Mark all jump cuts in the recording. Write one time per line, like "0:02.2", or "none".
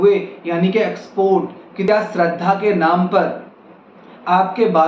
0:01.8